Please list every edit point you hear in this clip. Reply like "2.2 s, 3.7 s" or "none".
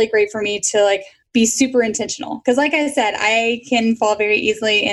2.0 s